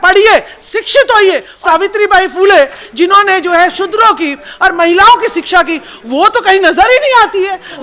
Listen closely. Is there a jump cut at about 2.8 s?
no; 1 cut; at 1.5 s

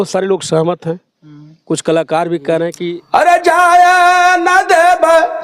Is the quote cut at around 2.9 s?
yes; 1 cut; at 2.9 s

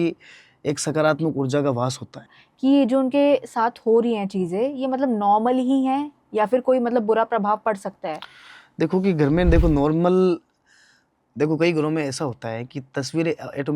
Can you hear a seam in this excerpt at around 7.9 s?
no; 1 cut; at 2.3 s

